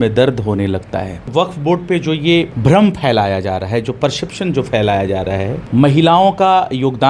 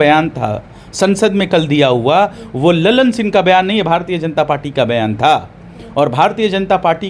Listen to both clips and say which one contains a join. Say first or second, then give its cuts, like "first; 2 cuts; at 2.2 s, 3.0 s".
first; 3 cuts; at 1.2 s, 2.5 s, 5.6 s